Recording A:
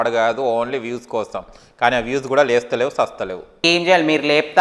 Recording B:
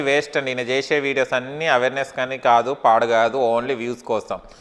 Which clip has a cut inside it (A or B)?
A